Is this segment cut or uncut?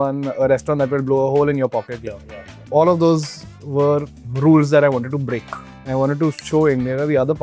cut